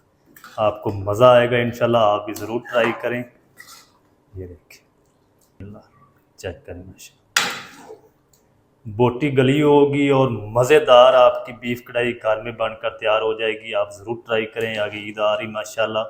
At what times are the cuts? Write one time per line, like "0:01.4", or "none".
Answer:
0:05.6